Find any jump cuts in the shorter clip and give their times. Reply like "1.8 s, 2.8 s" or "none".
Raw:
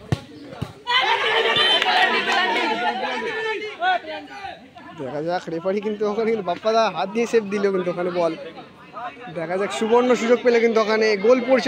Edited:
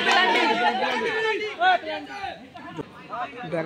2.7 s